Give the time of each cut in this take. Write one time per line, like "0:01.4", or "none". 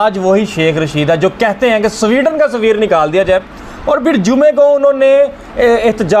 none